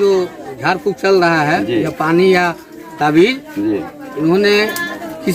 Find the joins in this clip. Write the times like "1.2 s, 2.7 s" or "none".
none